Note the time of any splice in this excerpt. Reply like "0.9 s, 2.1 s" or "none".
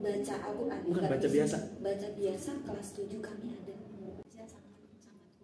4.3 s